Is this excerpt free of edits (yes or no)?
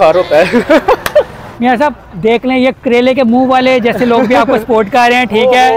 no